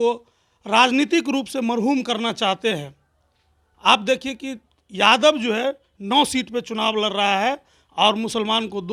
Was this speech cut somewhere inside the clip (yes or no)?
no